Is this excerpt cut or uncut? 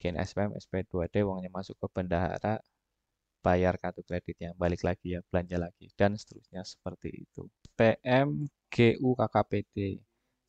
cut